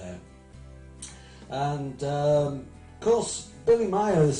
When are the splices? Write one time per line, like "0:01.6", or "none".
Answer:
none